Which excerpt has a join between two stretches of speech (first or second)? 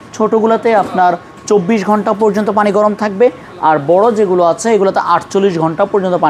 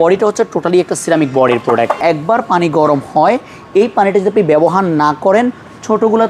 second